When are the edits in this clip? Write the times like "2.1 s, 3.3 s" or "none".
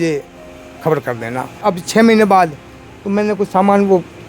1.5 s